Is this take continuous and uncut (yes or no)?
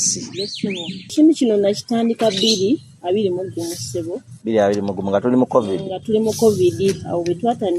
no